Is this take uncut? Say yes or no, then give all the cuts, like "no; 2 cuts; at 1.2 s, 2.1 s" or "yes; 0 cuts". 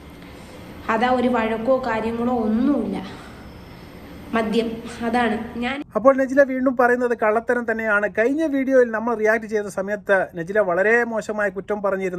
yes; 0 cuts